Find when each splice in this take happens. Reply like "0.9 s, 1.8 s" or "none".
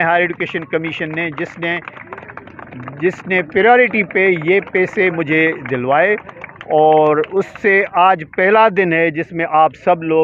none